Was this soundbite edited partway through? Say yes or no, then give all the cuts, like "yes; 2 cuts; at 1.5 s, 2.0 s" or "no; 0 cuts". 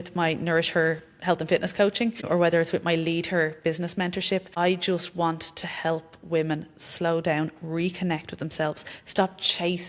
yes; 2 cuts; at 2.2 s, 4.5 s